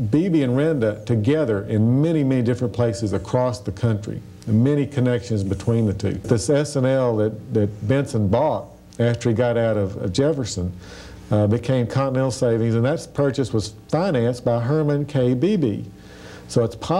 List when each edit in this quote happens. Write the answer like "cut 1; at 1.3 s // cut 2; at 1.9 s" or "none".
cut 1; at 6.2 s